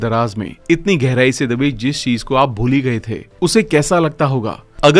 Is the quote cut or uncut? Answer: uncut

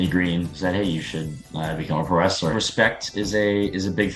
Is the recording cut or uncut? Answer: cut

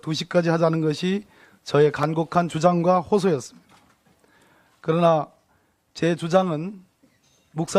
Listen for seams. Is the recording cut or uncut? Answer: uncut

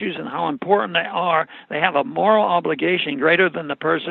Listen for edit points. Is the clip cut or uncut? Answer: uncut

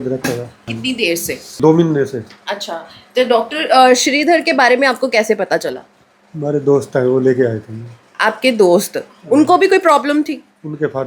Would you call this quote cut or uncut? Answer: uncut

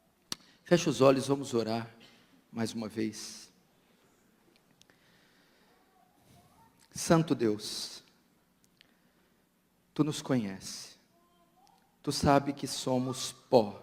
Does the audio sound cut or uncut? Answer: uncut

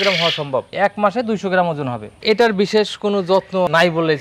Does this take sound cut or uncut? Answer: cut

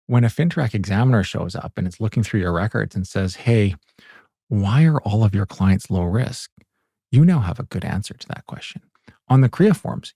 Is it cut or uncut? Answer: uncut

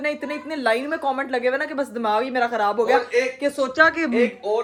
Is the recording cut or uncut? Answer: uncut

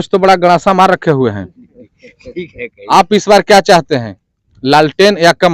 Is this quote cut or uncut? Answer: uncut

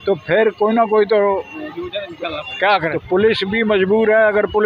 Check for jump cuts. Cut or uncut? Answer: cut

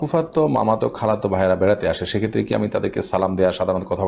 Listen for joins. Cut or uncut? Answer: uncut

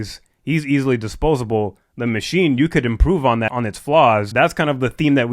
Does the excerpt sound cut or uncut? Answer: cut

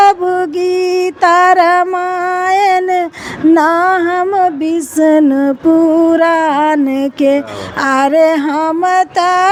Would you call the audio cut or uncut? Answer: uncut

